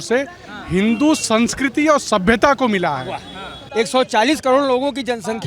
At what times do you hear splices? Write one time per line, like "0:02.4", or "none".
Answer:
0:03.6